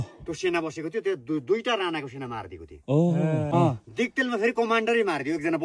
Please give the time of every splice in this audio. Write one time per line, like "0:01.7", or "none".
0:03.5